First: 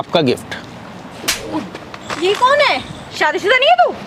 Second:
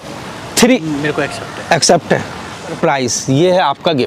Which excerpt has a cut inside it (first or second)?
second